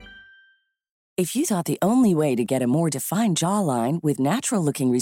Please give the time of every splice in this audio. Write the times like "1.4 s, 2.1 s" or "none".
1.0 s